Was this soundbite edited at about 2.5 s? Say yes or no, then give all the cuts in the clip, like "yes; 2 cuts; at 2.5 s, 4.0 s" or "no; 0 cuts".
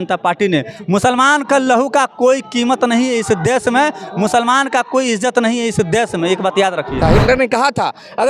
no; 1 cut; at 7.0 s